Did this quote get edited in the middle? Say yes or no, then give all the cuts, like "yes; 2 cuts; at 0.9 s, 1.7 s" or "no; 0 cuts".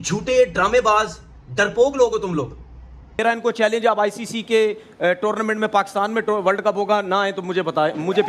yes; 1 cut; at 3.2 s